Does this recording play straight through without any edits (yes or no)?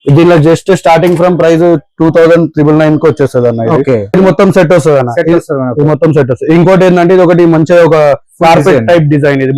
no